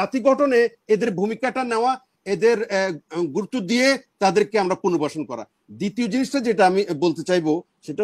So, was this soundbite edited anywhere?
no; 0 cuts

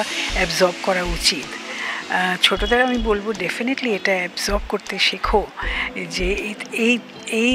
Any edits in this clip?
no; 0 cuts

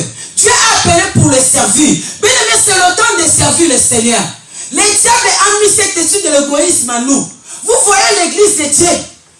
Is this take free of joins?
yes; 0 cuts

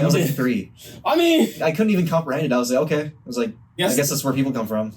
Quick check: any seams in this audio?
yes; 2 cuts; at 1.6 s, 3.8 s

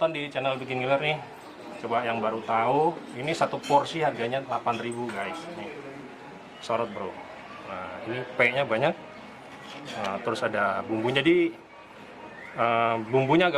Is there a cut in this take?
no; 0 cuts

